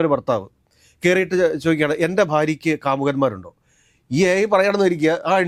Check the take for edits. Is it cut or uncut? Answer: uncut